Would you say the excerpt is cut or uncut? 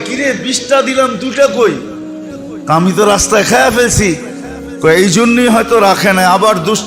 uncut